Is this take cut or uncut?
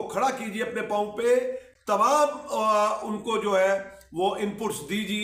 uncut